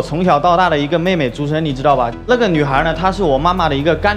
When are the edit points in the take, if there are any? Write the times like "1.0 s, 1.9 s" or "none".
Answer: none

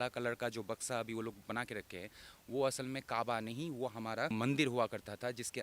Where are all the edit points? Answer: 4.3 s

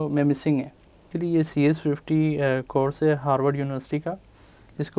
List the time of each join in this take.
1.1 s

